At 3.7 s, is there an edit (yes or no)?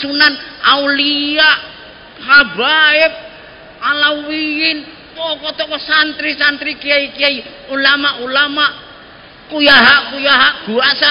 no